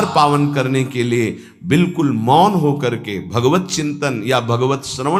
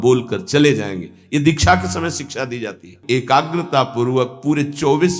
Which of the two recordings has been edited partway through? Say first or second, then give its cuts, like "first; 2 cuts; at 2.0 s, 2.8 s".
second; 1 cut; at 3.0 s